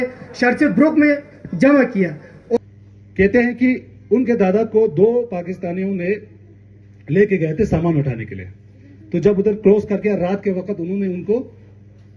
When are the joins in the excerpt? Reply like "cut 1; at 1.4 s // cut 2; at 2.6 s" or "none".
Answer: cut 1; at 2.6 s